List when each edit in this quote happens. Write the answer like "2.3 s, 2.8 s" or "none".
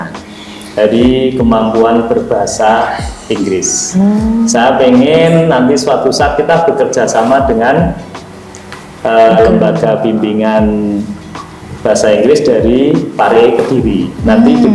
none